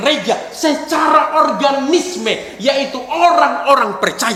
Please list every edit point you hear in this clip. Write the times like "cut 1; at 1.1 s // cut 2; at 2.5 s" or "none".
none